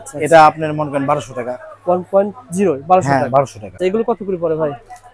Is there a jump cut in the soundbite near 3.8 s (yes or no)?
yes